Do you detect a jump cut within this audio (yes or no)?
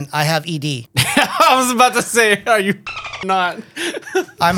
yes